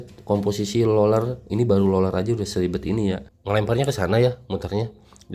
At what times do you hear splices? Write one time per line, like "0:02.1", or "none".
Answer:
0:03.3